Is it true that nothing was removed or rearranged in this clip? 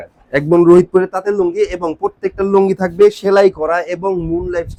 yes; 0 cuts

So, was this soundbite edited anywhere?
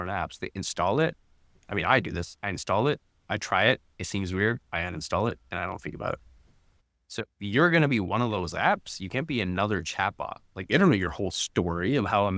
no; 0 cuts

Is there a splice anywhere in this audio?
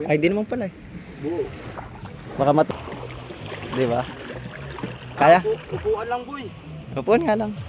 yes; 1 cut; at 2.7 s

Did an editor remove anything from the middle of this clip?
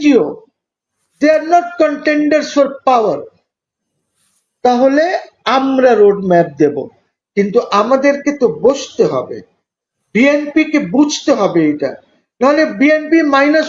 no; 0 cuts

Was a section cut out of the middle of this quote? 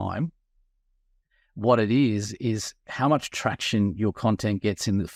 no; 0 cuts

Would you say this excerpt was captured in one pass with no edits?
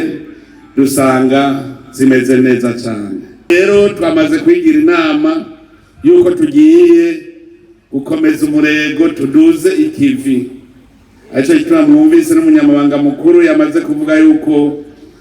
no; 1 cut; at 3.5 s

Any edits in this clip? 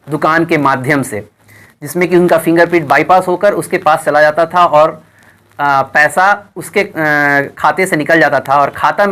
no; 0 cuts

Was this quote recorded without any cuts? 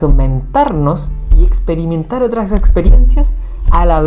yes; 0 cuts

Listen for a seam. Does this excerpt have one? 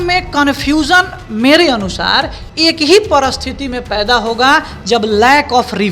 no; 0 cuts

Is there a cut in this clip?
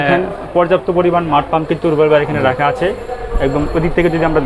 no; 0 cuts

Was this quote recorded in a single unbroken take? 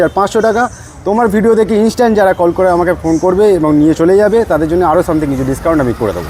yes; 0 cuts

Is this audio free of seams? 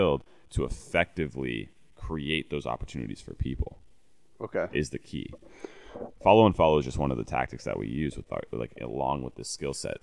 yes; 0 cuts

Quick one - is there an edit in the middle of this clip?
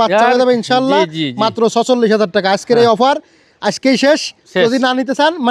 no; 0 cuts

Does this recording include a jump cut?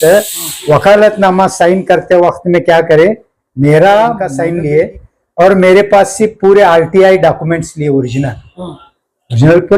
yes; 1 cut; at 4.3 s

